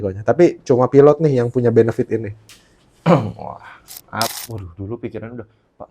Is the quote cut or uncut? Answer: cut